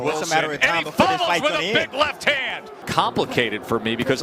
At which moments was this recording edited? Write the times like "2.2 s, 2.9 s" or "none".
2.7 s